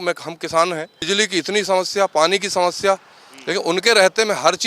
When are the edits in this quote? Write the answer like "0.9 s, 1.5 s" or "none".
1.0 s